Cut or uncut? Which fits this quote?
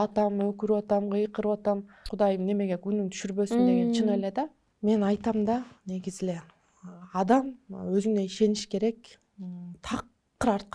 cut